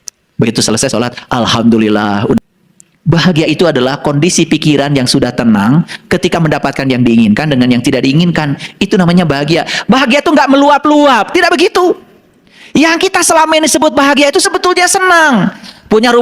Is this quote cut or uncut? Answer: cut